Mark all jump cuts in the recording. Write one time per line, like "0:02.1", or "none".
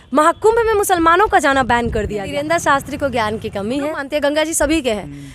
0:02.3
0:04.0